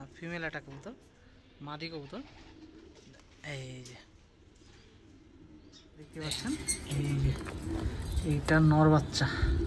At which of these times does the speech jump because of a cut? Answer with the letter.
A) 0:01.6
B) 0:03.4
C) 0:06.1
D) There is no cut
C